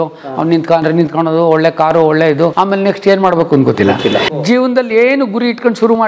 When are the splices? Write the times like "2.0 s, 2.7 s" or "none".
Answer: 2.5 s, 4.3 s